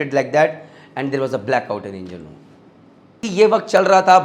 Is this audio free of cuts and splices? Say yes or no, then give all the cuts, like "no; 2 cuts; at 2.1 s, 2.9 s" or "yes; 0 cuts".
no; 1 cut; at 3.2 s